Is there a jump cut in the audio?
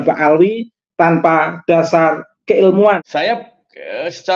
yes; 1 cut; at 3.0 s

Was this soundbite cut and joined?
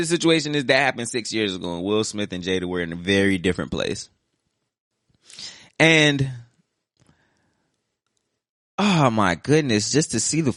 no; 0 cuts

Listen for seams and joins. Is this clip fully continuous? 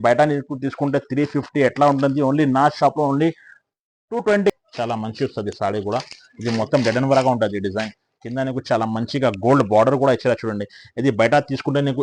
no; 1 cut; at 4.5 s

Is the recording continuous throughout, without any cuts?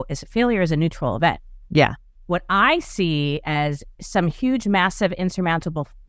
no; 2 cuts; at 1.5 s, 2.1 s

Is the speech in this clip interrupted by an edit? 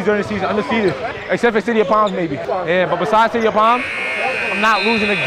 yes; 2 cuts; at 1.1 s, 2.4 s

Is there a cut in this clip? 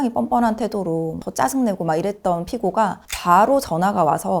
yes; 1 cut; at 1.2 s

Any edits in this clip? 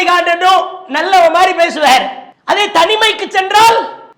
no; 0 cuts

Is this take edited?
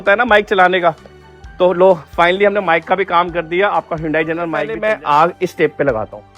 yes; 1 cut; at 4.7 s

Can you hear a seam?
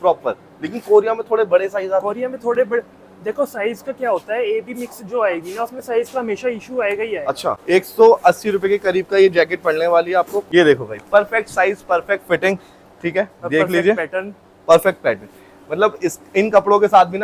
yes; 2 cuts; at 7.6 s, 10.4 s

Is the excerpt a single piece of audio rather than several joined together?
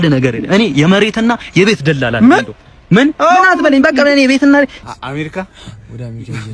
no; 1 cut; at 4.8 s

